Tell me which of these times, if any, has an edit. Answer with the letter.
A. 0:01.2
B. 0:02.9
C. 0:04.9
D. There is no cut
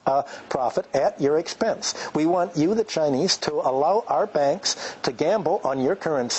D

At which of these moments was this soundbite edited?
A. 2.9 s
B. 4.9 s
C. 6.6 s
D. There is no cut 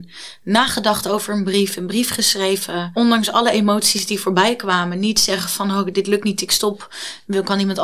A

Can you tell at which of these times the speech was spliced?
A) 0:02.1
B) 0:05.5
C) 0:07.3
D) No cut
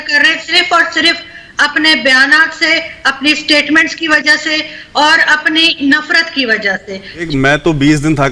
C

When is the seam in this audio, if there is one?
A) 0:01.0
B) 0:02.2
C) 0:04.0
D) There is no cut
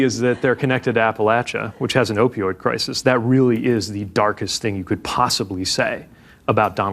D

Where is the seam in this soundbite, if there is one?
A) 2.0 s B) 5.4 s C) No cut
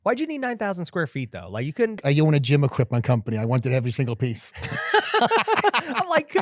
A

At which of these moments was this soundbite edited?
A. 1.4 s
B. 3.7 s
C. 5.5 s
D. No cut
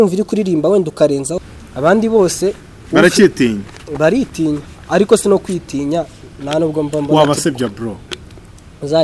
A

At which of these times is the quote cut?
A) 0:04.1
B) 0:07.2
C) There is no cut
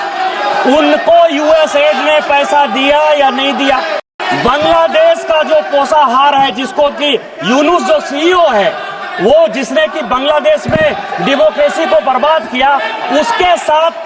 A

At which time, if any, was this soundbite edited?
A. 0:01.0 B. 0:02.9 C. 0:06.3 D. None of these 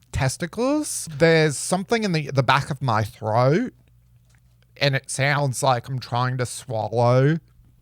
A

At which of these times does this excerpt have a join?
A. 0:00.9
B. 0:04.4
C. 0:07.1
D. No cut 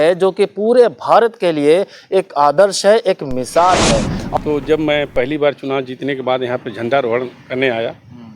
B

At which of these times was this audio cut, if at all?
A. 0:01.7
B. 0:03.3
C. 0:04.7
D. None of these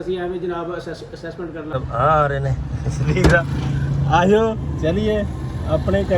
A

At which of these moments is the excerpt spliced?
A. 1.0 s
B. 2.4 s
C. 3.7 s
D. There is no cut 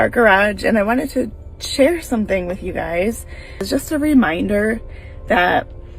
C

